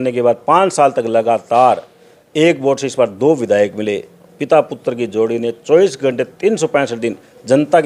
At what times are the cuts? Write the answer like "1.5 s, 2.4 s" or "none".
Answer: none